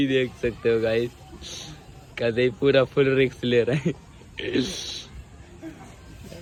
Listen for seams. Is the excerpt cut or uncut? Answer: uncut